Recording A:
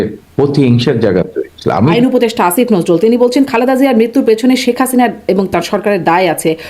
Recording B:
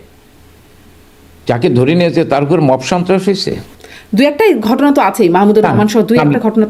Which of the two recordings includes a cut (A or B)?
A